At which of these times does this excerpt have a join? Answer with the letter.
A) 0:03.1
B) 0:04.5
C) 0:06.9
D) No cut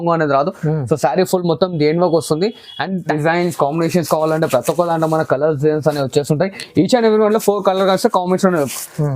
A